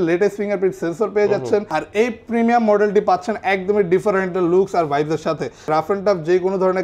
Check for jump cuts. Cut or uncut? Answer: cut